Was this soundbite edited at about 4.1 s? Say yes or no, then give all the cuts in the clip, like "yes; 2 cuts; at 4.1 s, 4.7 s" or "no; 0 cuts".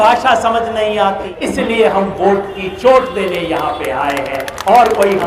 no; 1 cut; at 1.3 s